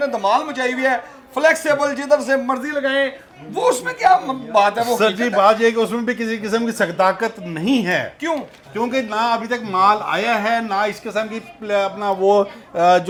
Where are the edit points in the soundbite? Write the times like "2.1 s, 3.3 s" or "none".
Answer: none